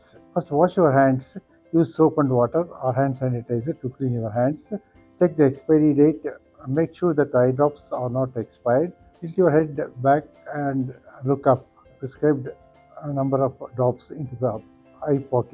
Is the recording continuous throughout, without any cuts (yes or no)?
no